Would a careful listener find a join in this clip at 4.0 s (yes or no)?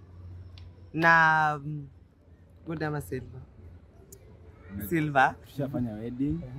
no